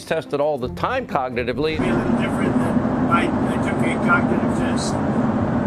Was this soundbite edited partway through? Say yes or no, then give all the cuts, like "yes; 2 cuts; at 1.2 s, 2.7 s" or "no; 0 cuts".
yes; 1 cut; at 1.7 s